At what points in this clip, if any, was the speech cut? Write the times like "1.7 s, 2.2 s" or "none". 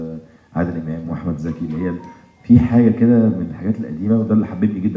none